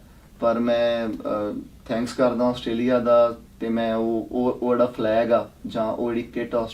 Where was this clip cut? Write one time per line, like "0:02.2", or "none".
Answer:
0:03.5